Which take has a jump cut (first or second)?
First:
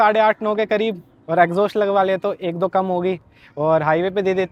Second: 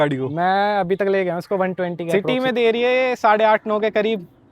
second